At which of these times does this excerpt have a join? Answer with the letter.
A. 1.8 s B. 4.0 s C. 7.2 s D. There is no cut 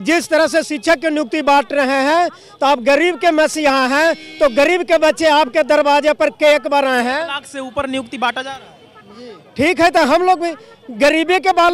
D